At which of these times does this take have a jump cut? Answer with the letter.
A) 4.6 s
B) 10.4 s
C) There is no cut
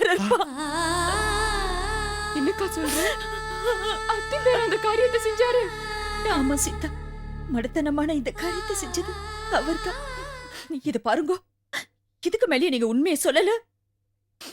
B